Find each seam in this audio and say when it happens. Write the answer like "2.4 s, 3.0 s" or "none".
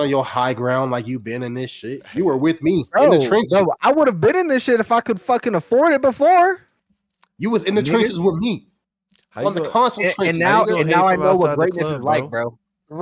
none